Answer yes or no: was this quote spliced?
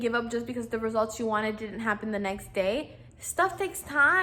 no